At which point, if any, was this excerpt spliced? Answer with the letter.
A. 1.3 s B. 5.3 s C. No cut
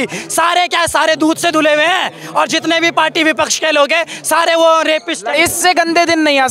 B